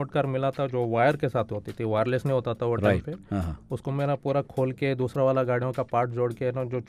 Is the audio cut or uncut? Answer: uncut